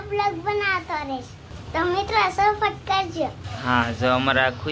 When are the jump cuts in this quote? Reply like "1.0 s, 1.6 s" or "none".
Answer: 3.5 s